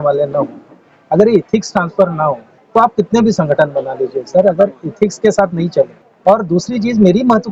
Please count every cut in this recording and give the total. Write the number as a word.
two